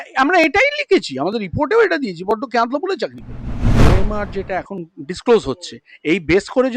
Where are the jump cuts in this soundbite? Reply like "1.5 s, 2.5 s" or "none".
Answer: 3.8 s